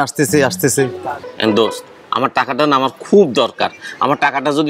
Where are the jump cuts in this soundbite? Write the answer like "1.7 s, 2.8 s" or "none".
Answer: 1.2 s